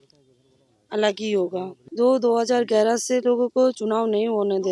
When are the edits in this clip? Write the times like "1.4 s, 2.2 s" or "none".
1.8 s